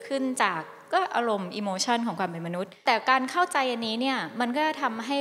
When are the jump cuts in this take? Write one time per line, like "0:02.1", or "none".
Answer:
0:02.8